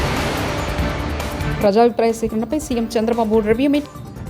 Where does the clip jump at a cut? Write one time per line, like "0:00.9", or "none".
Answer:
0:01.5